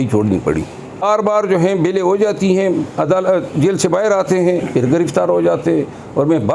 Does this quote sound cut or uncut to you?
cut